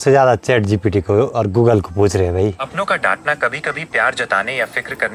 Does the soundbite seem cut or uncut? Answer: uncut